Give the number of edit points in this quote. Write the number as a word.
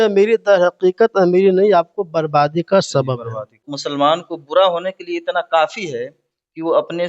one